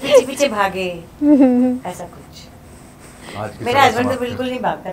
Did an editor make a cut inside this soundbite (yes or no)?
no